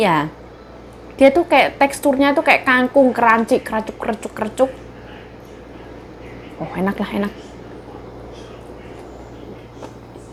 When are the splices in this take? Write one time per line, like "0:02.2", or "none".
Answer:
none